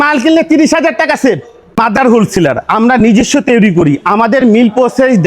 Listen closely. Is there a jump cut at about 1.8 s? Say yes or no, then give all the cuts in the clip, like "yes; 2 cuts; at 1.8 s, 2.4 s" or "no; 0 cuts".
yes; 1 cut; at 1.8 s